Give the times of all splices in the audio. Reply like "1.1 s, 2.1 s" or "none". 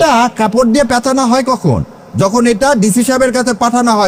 none